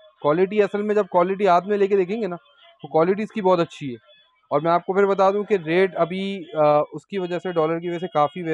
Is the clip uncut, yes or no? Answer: yes